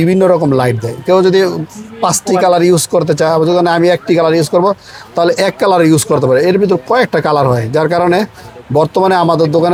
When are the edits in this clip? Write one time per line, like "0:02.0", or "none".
none